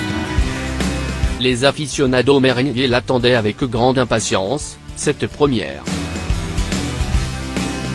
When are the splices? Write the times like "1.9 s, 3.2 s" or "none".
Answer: 1.3 s, 5.8 s